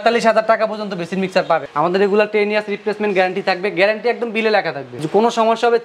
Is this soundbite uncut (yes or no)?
no